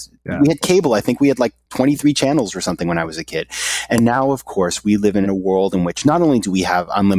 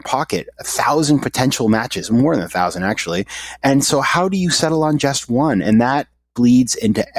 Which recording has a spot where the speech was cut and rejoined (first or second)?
first